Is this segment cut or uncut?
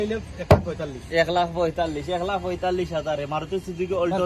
uncut